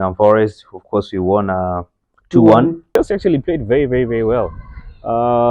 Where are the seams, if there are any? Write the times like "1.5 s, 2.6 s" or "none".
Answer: 2.9 s